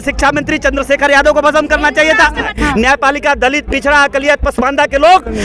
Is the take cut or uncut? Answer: cut